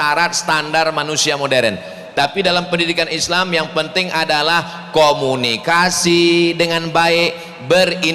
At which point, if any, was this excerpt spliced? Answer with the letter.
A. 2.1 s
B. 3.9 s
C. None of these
C